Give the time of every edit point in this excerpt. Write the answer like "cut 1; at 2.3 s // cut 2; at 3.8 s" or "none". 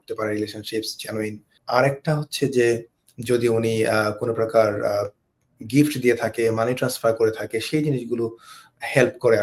cut 1; at 1.5 s